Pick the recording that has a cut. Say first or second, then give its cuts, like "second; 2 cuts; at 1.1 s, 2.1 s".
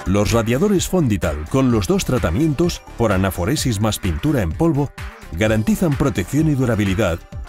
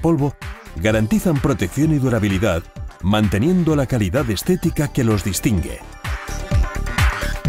second; 1 cut; at 6.2 s